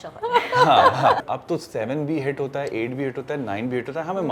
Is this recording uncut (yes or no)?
no